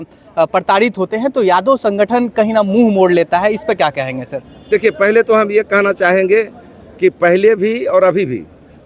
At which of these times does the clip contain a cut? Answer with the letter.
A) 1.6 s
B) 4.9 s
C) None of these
C